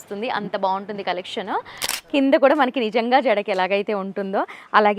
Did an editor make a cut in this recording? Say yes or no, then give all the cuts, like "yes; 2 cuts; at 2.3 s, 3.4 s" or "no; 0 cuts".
yes; 1 cut; at 2.0 s